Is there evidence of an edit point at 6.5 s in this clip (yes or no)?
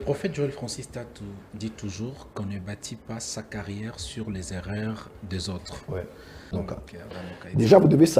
yes